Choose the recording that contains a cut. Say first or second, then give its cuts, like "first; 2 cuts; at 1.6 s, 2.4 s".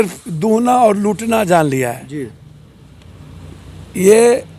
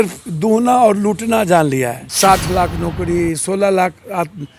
second; 1 cut; at 2.0 s